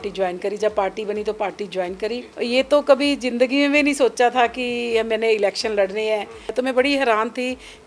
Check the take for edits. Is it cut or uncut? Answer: cut